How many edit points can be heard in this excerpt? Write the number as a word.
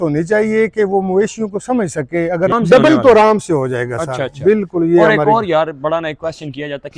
one